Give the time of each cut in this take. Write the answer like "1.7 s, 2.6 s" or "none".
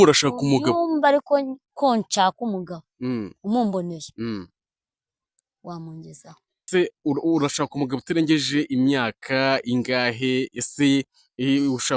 6.6 s